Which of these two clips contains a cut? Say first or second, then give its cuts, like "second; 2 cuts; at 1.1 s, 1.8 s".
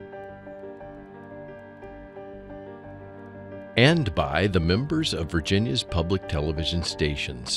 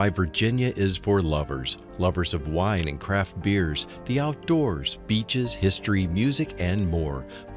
first; 1 cut; at 3.7 s